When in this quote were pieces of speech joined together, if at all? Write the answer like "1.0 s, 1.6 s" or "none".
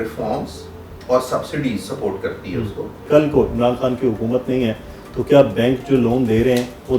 3.0 s